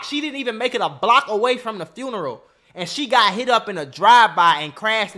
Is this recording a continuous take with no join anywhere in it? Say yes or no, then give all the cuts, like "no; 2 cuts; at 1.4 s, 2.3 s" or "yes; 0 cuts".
yes; 0 cuts